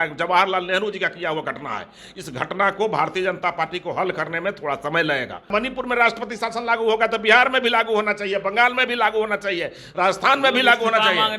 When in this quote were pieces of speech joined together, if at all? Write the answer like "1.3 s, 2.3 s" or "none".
5.5 s